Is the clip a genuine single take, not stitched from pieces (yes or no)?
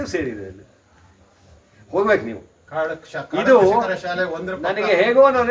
yes